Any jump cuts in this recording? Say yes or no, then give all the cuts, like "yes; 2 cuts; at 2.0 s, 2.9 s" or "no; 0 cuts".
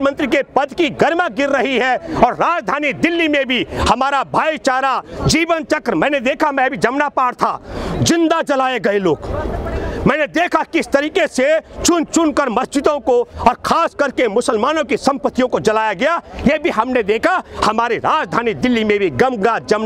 no; 0 cuts